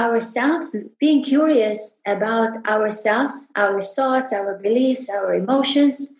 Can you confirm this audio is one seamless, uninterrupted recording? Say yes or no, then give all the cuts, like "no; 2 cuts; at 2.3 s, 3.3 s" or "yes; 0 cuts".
yes; 0 cuts